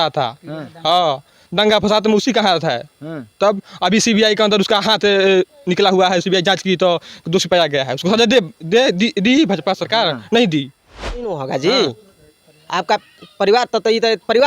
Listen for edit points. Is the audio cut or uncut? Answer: cut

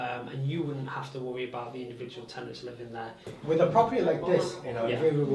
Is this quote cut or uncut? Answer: cut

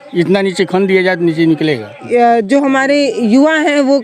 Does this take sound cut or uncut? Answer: cut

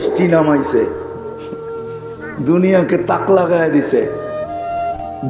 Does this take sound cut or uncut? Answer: cut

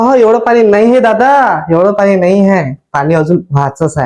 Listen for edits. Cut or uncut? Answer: uncut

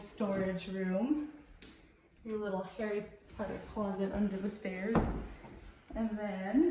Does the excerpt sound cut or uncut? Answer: uncut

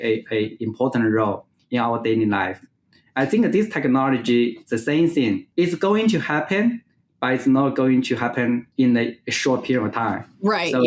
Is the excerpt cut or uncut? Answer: cut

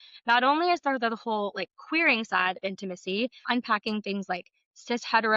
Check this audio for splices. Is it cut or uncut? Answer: cut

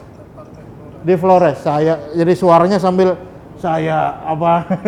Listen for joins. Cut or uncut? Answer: uncut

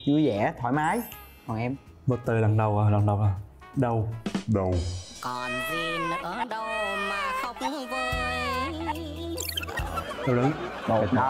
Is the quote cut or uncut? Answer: uncut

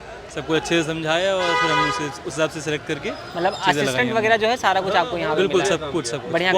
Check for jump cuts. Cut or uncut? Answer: uncut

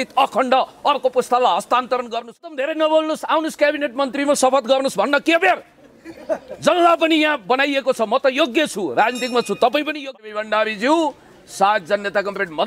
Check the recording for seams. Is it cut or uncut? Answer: cut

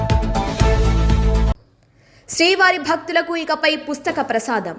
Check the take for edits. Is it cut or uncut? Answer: cut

